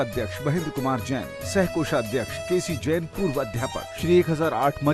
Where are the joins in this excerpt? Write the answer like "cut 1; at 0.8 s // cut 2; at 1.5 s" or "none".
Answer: cut 1; at 2.4 s // cut 2; at 3.9 s